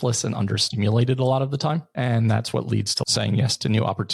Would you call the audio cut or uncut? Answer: cut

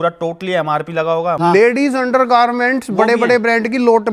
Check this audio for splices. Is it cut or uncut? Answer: cut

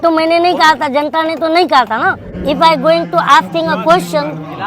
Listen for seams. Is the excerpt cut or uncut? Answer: cut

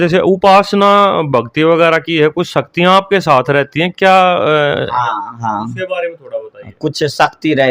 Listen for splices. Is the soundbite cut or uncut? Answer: uncut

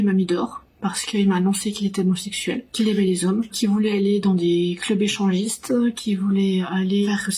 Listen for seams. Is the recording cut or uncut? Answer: uncut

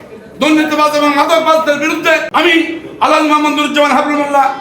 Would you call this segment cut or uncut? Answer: cut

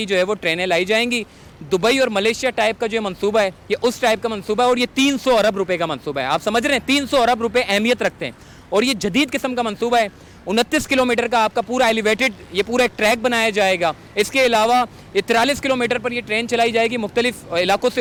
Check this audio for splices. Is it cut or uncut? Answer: uncut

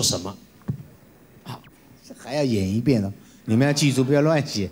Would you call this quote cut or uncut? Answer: uncut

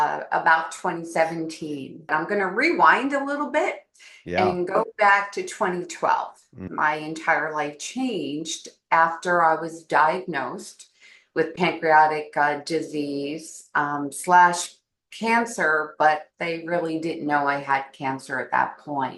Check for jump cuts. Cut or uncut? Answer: cut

